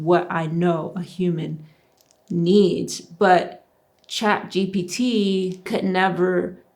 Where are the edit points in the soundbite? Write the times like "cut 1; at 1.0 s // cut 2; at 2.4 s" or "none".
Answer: cut 1; at 5.7 s